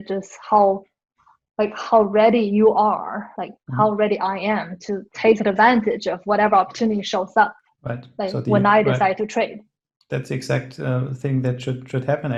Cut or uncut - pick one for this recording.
uncut